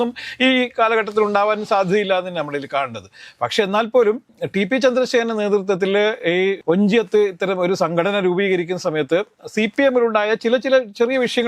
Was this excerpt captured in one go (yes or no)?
yes